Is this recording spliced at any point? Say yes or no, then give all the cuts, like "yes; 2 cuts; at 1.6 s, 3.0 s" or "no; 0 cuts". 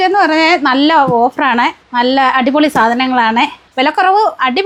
no; 0 cuts